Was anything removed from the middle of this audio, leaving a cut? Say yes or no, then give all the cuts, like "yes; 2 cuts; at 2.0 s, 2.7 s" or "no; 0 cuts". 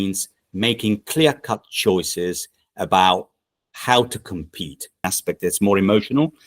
yes; 1 cut; at 5.1 s